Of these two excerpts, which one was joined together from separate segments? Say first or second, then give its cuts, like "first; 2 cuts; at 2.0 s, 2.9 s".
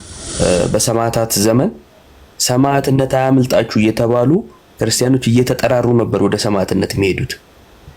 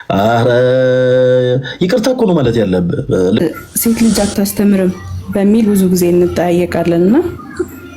second; 1 cut; at 3.4 s